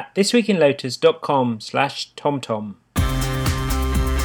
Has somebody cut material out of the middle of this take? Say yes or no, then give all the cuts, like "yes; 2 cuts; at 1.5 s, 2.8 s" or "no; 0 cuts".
yes; 1 cut; at 2.8 s